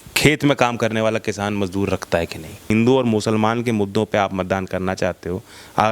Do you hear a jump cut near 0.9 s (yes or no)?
no